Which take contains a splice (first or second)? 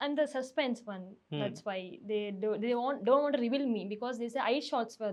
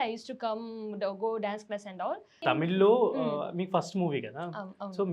second